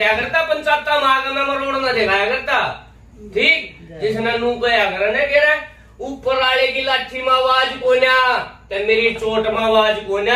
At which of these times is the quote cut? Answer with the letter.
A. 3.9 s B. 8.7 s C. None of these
C